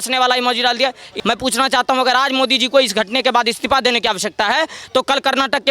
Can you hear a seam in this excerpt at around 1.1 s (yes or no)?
yes